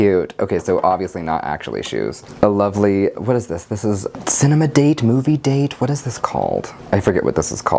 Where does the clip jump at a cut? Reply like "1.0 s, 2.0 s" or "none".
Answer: none